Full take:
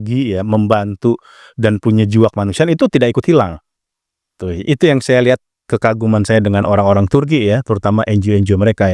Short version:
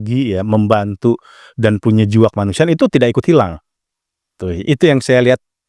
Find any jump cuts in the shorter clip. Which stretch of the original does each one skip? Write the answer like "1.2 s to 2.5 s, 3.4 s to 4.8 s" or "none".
none